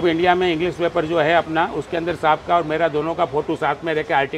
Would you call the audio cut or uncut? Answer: uncut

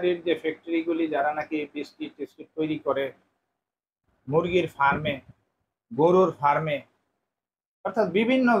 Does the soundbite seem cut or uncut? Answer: uncut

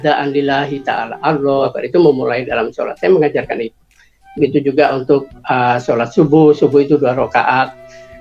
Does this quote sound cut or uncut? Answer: cut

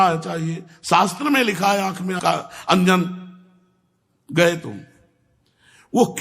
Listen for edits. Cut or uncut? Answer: cut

